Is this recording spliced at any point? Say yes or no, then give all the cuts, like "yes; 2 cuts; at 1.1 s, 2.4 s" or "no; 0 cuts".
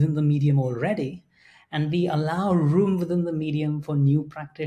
no; 0 cuts